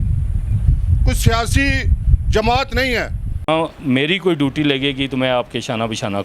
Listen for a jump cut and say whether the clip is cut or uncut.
cut